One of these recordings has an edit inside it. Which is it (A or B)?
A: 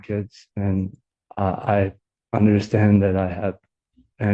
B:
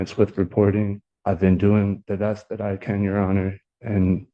B